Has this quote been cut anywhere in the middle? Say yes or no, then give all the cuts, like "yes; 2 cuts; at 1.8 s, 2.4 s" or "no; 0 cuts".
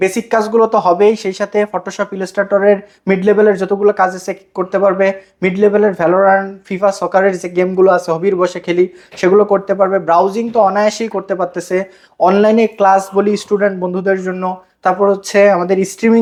no; 0 cuts